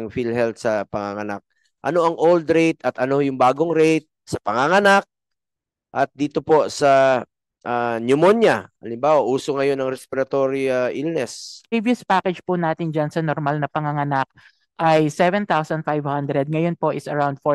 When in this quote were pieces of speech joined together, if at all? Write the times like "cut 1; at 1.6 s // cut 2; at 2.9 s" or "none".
cut 1; at 11.7 s